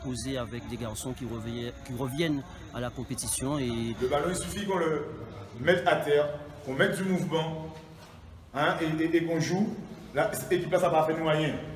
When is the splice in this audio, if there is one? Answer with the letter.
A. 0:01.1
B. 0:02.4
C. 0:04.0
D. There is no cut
C